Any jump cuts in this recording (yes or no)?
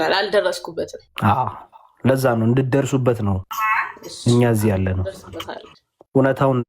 yes